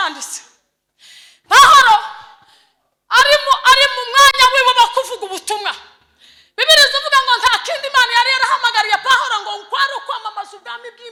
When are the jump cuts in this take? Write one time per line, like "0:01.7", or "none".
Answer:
none